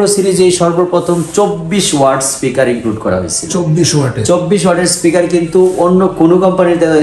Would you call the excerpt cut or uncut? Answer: uncut